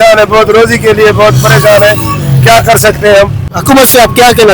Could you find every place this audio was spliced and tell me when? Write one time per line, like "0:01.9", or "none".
0:03.5